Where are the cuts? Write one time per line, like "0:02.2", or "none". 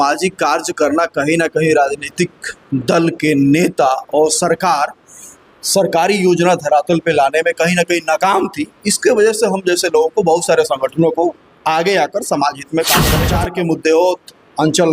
0:13.2